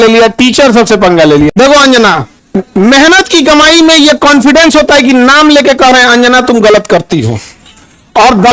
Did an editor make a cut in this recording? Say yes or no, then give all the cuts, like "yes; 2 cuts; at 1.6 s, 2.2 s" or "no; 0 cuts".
yes; 2 cuts; at 1.5 s, 2.3 s